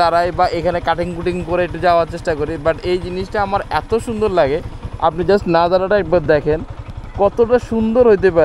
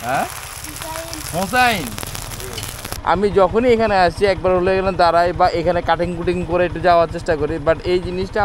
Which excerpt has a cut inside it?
second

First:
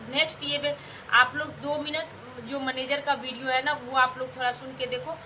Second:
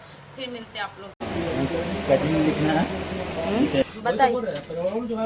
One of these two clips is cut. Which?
second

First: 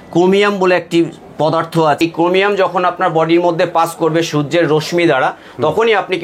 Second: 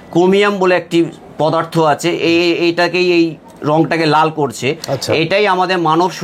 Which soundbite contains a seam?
first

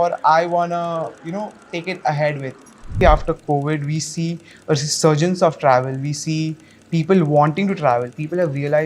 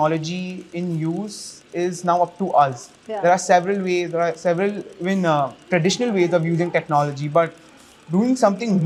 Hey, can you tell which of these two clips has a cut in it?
first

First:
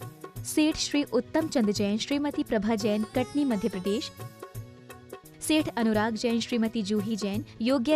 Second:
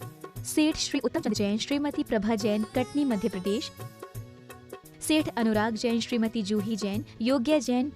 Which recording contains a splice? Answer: second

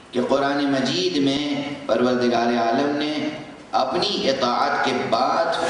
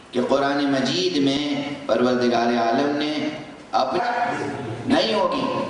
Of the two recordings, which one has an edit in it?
first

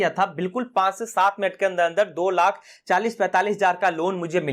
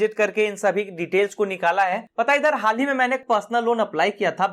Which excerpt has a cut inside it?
second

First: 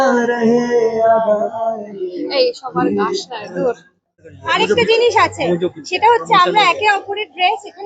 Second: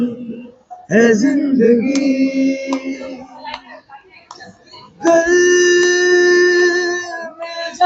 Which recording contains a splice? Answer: first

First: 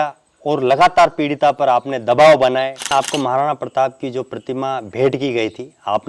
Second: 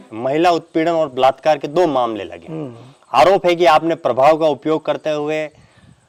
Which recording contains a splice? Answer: first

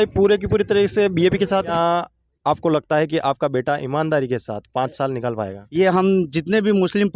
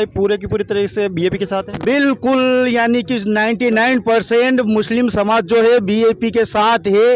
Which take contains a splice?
first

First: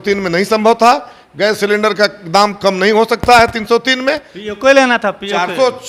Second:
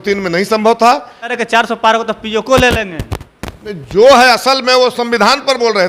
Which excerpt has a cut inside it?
second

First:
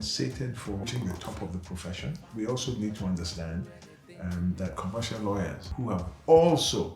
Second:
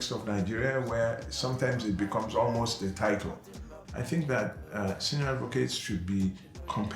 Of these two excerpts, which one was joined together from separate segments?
first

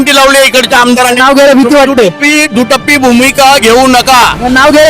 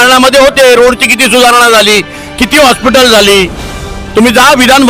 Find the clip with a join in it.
first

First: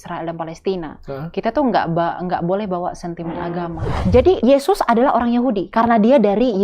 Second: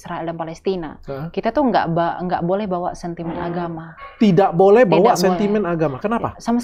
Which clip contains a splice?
first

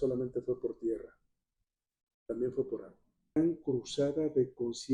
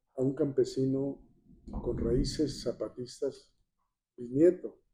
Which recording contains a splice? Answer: first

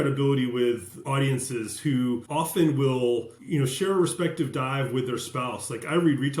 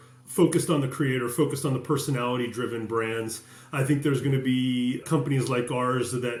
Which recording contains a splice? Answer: first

